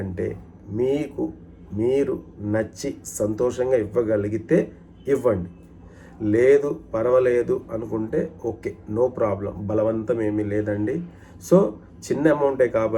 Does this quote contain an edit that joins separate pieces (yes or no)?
no